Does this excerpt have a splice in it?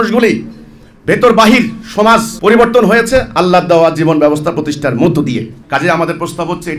yes; 1 cut; at 5.6 s

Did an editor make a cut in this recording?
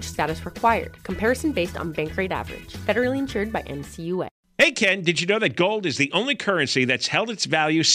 yes; 1 cut; at 4.4 s

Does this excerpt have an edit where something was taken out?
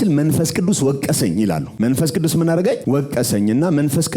yes; 2 cuts; at 1.7 s, 2.8 s

